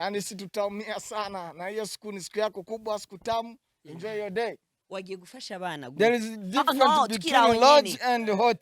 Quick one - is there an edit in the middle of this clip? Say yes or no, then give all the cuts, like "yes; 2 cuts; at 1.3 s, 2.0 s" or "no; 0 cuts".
yes; 1 cut; at 4.7 s